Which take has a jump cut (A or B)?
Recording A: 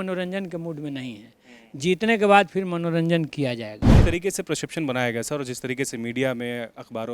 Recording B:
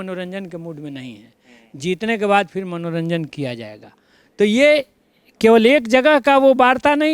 A